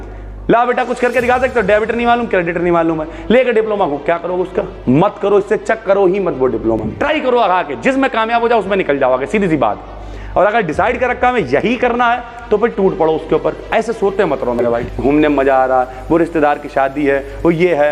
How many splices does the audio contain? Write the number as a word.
two